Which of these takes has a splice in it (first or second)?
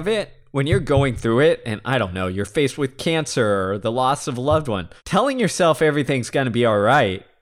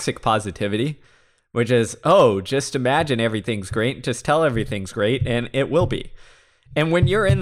first